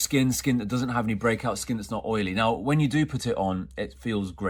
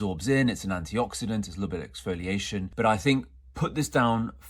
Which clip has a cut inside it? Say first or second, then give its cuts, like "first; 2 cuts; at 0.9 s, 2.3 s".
second; 1 cut; at 2.7 s